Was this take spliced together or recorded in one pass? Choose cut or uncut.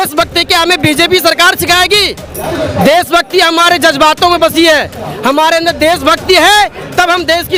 uncut